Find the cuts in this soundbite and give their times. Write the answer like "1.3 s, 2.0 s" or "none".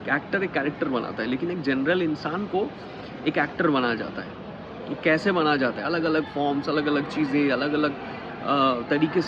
none